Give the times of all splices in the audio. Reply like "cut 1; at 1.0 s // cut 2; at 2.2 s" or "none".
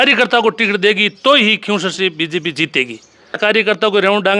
cut 1; at 3.4 s